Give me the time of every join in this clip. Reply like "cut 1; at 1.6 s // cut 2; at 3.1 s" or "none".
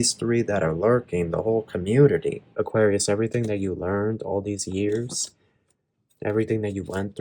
cut 1; at 2.4 s

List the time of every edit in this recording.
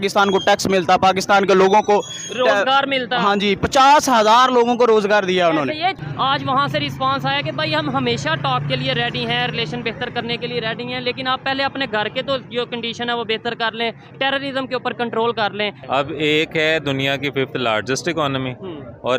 cut 1; at 6.0 s // cut 2; at 15.8 s

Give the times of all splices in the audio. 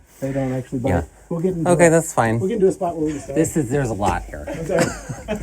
cut 1; at 3.2 s

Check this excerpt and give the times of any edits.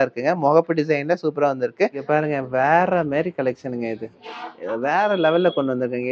cut 1; at 2.0 s

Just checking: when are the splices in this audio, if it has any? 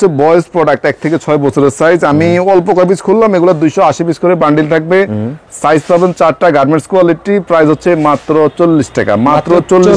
none

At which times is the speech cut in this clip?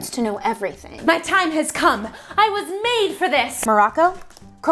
cut 1; at 0.9 s // cut 2; at 3.5 s

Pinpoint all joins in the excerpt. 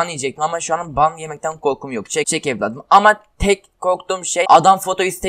cut 1; at 2.3 s // cut 2; at 4.4 s

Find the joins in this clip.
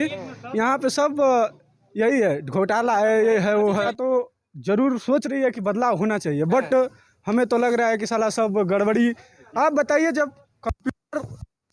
cut 1; at 3.9 s

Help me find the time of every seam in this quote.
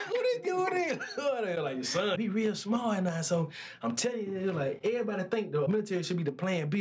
cut 1; at 2.2 s // cut 2; at 5.7 s

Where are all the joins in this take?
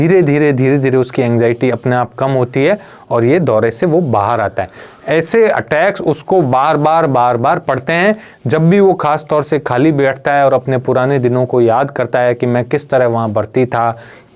none

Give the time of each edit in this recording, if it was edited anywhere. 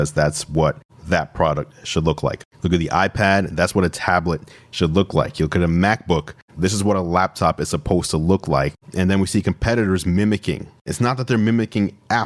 cut 1; at 6.4 s // cut 2; at 10.9 s

